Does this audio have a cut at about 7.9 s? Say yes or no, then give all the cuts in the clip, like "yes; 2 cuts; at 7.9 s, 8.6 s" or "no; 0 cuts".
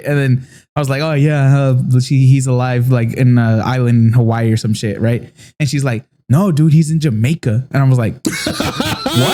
no; 0 cuts